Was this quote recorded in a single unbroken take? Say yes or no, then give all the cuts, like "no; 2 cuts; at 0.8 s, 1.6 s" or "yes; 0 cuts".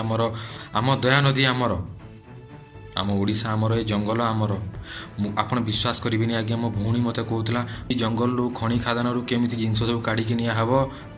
no; 1 cut; at 7.9 s